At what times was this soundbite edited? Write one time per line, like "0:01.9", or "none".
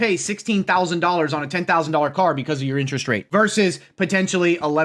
0:03.2